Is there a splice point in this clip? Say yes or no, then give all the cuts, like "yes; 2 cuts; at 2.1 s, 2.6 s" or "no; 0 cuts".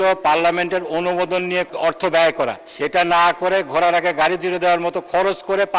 yes; 2 cuts; at 1.7 s, 2.6 s